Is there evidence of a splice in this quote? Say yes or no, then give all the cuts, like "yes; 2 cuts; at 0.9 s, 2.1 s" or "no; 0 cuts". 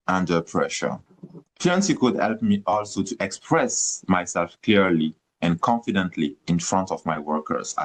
no; 0 cuts